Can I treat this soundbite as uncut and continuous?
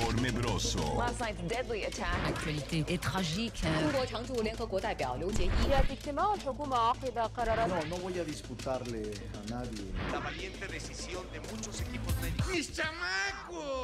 yes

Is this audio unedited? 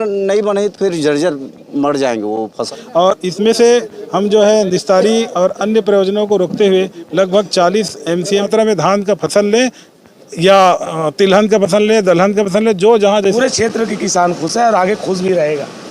no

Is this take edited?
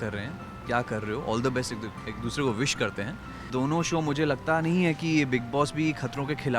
yes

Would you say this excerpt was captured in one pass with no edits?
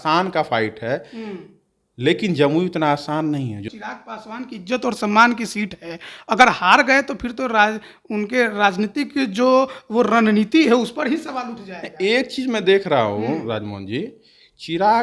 no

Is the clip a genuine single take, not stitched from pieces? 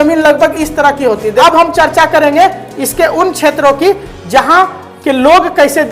no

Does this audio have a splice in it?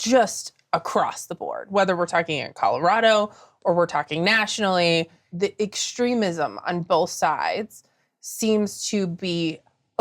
yes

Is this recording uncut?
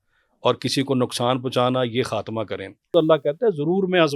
no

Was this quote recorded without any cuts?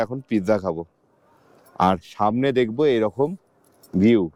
yes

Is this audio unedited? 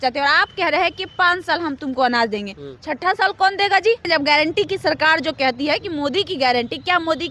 no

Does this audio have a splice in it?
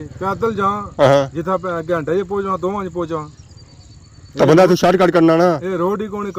no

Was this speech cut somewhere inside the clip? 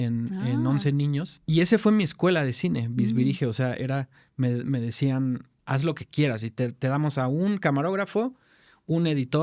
yes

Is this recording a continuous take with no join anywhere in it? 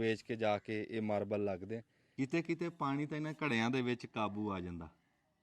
no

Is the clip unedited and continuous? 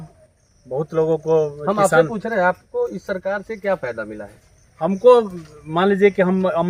yes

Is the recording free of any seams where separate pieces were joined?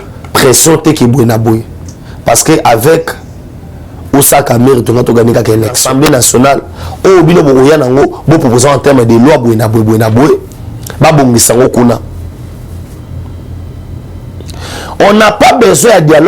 no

